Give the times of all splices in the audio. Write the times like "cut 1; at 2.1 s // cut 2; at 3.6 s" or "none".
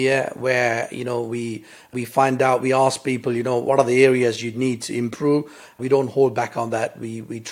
cut 1; at 1.9 s // cut 2; at 3.6 s // cut 3; at 5.8 s